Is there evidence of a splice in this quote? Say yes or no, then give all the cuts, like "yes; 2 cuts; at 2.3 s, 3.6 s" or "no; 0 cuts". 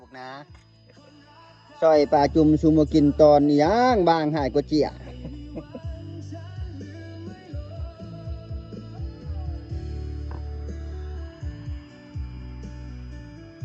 no; 0 cuts